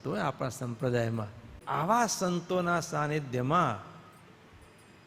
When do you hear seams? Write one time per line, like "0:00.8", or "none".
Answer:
0:01.5

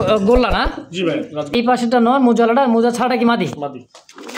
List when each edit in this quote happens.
0:01.5

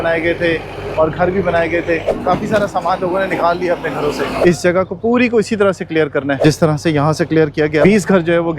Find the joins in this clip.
0:02.2
0:04.3
0:06.4
0:07.8

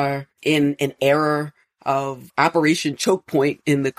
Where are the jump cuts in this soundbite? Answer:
0:02.2

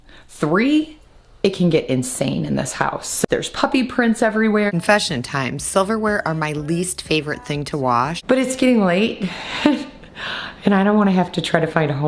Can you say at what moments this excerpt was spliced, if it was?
0:03.2
0:04.7
0:08.2

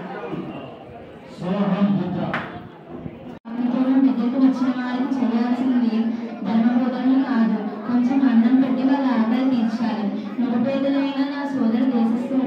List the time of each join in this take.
0:03.4

